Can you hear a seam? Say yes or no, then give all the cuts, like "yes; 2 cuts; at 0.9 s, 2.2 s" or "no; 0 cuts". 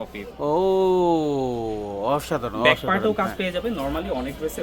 no; 0 cuts